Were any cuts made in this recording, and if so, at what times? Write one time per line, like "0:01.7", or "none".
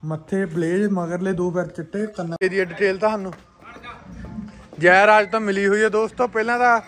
0:02.3